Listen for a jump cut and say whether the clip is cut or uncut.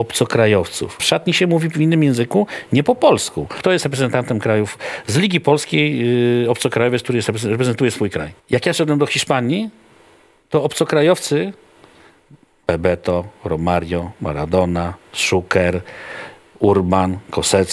cut